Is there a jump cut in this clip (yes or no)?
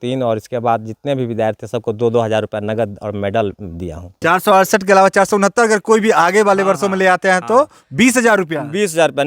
yes